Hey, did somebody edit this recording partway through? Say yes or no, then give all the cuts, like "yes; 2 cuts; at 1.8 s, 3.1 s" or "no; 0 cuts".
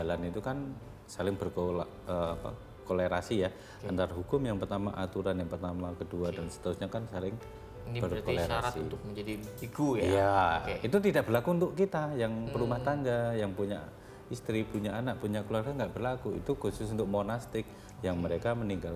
no; 0 cuts